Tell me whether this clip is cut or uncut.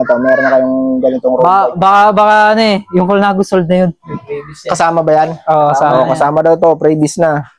uncut